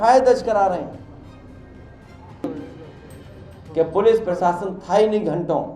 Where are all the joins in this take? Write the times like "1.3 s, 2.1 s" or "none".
none